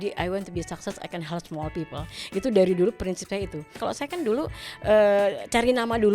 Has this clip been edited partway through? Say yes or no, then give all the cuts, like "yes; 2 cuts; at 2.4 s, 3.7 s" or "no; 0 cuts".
yes; 1 cut; at 3.8 s